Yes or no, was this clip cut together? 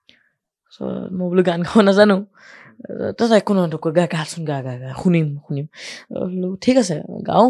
no